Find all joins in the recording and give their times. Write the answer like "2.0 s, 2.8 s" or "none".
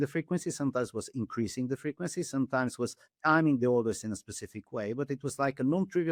none